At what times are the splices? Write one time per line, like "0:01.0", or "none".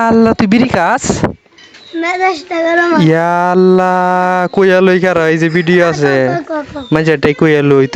none